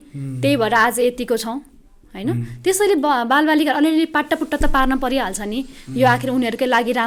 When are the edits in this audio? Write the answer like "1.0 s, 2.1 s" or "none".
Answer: none